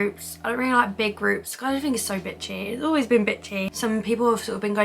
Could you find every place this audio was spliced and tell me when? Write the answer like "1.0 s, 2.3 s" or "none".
3.7 s